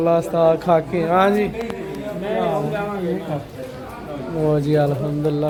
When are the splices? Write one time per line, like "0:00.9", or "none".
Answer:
none